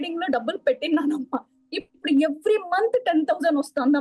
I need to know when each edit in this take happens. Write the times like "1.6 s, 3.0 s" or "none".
none

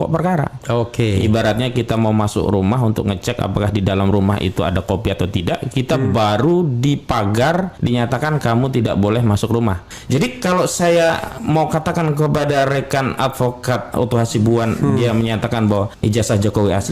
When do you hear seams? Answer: 7.7 s, 9.9 s, 15.9 s

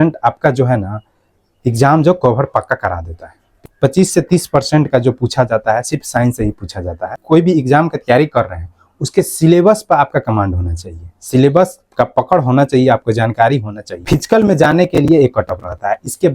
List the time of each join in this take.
3.7 s, 7.2 s, 13.9 s

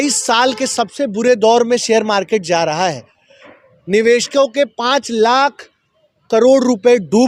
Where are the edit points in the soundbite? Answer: none

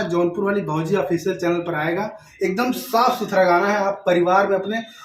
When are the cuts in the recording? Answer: 2.2 s

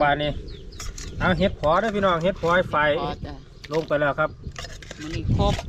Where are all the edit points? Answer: none

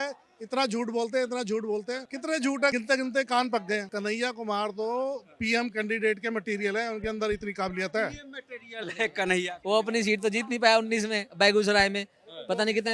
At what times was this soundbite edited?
2.7 s, 3.9 s

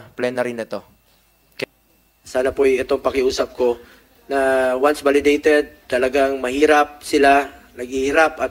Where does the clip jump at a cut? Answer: 1.6 s

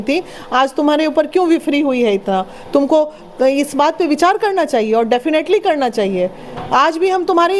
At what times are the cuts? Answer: none

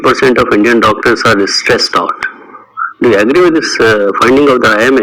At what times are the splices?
none

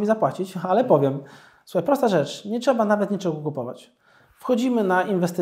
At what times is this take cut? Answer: none

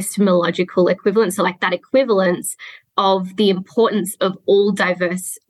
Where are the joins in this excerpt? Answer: none

